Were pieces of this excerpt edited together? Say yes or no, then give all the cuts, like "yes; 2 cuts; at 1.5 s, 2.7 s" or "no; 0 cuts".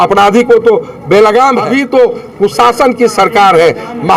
yes; 1 cut; at 1.7 s